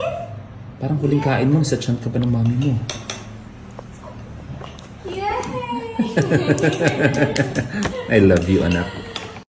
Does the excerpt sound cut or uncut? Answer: uncut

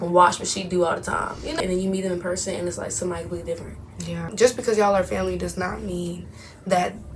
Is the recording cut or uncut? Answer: cut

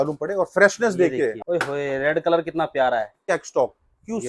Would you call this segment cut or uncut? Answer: cut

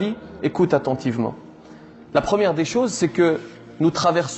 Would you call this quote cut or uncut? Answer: uncut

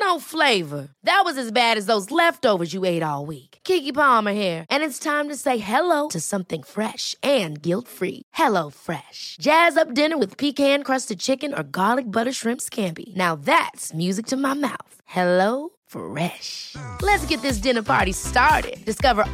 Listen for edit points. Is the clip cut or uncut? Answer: uncut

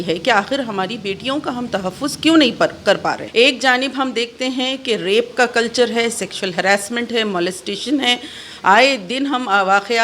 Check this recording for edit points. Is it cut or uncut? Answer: cut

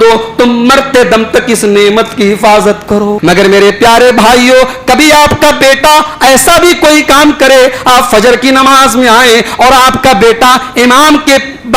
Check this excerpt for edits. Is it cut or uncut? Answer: cut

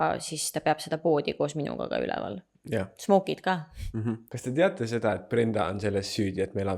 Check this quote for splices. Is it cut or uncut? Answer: cut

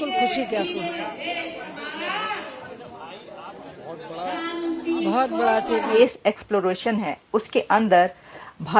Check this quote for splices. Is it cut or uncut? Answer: uncut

